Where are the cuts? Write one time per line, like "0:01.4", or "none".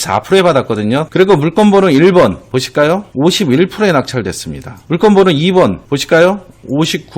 0:01.1